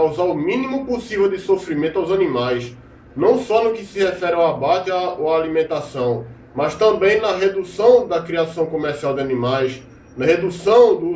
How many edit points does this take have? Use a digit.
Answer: 1